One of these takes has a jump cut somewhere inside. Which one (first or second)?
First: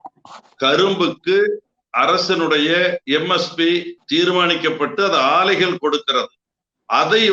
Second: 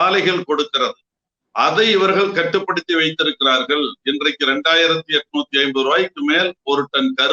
first